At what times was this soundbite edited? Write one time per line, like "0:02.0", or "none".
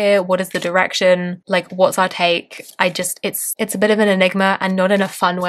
none